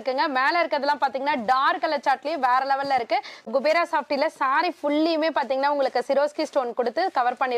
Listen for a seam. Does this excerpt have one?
yes; 1 cut; at 3.5 s

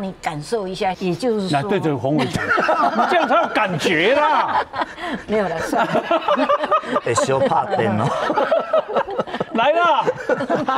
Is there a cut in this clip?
yes; 1 cut; at 1.0 s

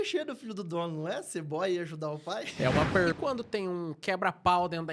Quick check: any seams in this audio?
yes; 1 cut; at 2.9 s

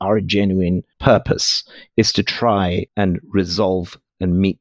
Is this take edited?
yes; 1 cut; at 2.9 s

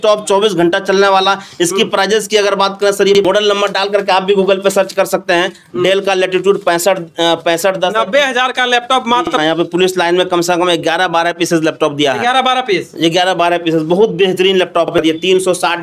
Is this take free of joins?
no; 3 cuts; at 3.2 s, 9.4 s, 14.9 s

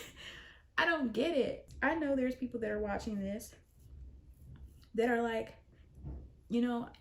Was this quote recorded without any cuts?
no; 1 cut; at 1.6 s

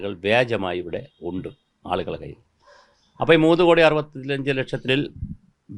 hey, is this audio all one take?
no; 1 cut; at 4.8 s

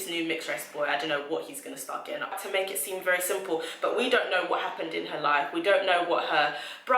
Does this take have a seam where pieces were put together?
yes; 1 cut; at 2.4 s

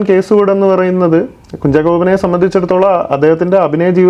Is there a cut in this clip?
no; 0 cuts

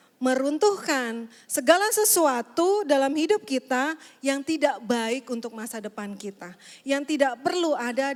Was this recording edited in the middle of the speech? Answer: no; 0 cuts

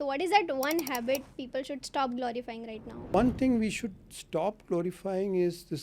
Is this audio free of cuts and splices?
no; 1 cut; at 3.1 s

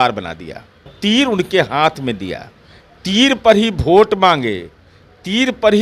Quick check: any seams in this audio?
yes; 1 cut; at 0.9 s

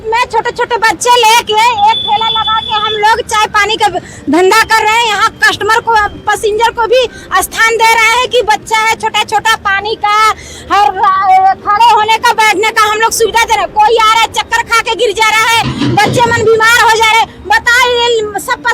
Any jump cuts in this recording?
no; 0 cuts

